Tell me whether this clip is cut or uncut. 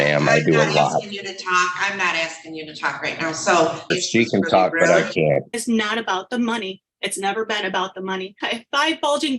cut